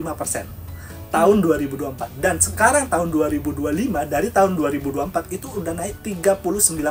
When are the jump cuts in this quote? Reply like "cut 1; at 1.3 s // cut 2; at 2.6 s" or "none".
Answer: cut 1; at 6.0 s